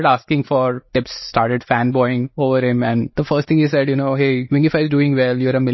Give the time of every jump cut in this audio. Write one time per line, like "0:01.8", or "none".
0:00.8
0:02.3
0:03.1
0:04.4